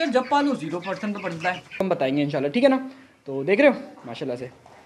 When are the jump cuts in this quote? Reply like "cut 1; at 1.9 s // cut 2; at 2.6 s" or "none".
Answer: cut 1; at 1.8 s